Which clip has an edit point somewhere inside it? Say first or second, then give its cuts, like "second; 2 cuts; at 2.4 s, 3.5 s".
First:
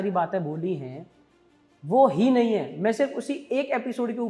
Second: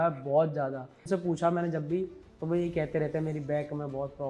second; 1 cut; at 1.0 s